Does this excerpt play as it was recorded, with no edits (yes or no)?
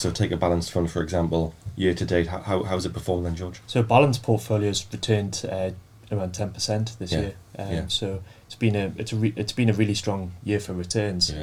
yes